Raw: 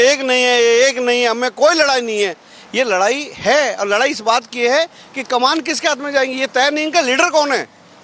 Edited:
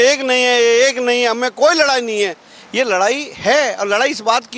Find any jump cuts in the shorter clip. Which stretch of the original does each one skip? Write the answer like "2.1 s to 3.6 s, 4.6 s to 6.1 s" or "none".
none

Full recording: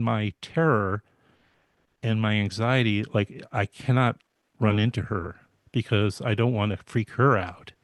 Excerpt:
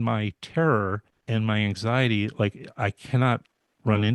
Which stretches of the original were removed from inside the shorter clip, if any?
1.1 s to 1.9 s

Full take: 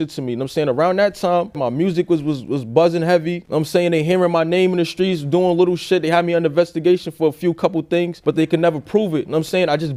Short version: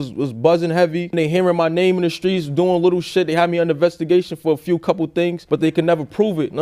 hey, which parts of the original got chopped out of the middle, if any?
3.5 s to 3.9 s

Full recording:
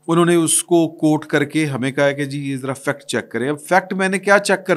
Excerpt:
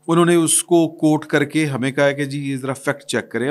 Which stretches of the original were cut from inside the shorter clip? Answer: none

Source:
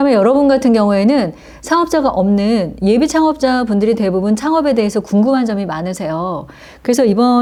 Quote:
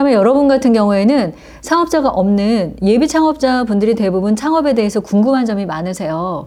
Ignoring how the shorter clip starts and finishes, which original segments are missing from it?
none

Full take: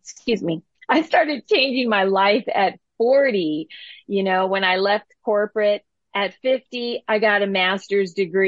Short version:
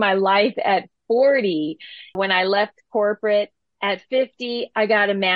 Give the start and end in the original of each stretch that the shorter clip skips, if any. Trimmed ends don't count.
4.1 s to 4.5 s

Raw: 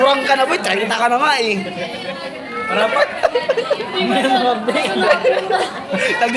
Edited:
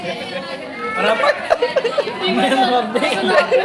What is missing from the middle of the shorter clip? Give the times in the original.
none

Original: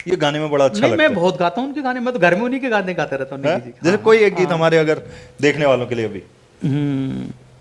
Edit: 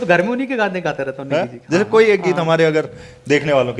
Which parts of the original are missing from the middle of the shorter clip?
none

